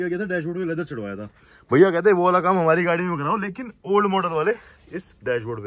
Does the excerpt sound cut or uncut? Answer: uncut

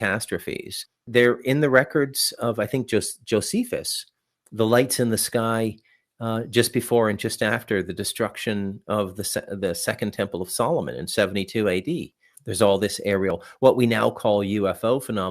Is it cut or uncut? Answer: cut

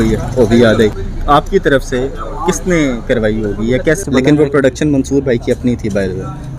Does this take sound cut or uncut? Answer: cut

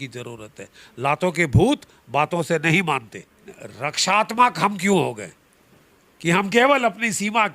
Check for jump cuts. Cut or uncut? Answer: cut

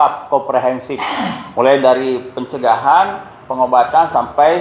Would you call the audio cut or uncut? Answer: uncut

